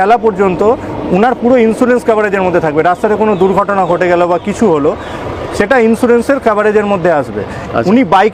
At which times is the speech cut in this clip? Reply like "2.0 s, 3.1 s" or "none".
none